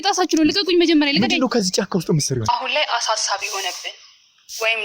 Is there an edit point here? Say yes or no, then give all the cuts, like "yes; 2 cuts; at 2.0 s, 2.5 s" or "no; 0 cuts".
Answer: yes; 1 cut; at 2.4 s